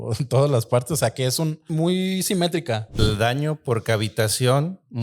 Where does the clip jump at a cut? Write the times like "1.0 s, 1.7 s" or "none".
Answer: 1.7 s, 3.0 s